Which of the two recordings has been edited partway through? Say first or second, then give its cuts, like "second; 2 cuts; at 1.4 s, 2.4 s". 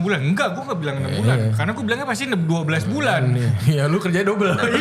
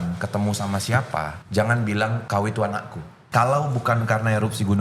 second; 3 cuts; at 1.4 s, 2.2 s, 3.2 s